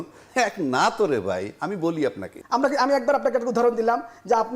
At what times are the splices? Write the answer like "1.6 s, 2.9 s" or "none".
2.3 s